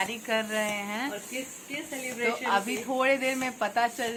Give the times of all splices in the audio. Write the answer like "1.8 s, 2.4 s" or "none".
none